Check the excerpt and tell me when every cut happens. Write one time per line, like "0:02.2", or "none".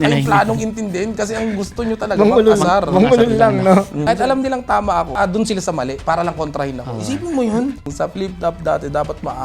0:04.0
0:05.1
0:07.9